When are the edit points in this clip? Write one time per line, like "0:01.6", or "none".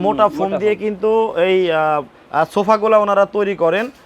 0:02.1